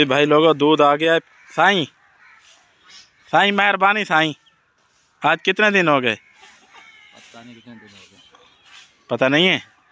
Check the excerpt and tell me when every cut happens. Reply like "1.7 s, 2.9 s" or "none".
1.2 s